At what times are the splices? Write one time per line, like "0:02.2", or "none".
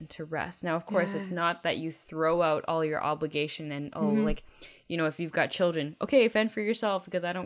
none